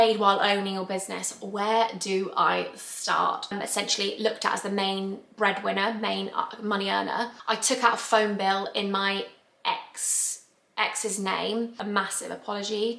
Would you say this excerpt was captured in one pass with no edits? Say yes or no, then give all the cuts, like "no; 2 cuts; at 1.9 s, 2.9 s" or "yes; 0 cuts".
no; 3 cuts; at 3.5 s, 7.4 s, 11.8 s